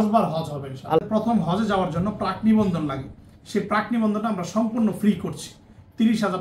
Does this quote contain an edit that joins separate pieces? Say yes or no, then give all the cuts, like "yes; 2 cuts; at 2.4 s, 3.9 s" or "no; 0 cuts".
yes; 1 cut; at 1.1 s